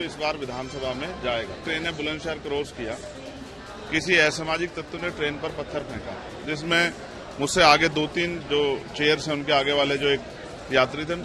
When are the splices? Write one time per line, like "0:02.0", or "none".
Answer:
0:01.6